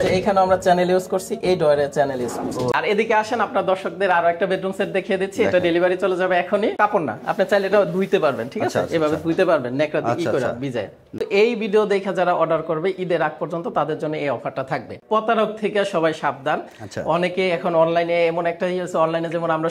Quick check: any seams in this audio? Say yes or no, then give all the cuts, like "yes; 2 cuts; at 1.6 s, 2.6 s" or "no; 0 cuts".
yes; 4 cuts; at 2.7 s, 6.8 s, 11.2 s, 15.0 s